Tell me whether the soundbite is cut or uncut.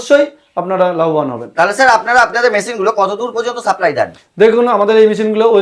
uncut